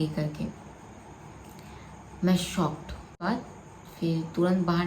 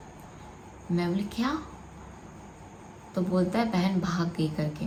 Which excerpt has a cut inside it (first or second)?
first